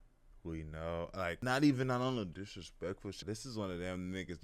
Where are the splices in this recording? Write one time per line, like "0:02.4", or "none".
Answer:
0:01.4
0:03.2